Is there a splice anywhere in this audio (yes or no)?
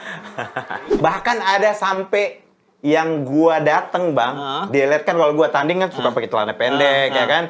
yes